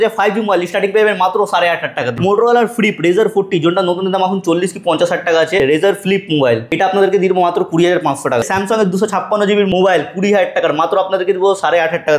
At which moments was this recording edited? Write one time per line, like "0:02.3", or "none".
0:02.1
0:05.6
0:06.7
0:08.5
0:09.7